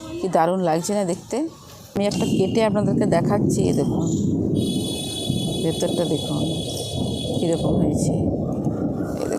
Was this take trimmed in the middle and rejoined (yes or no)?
yes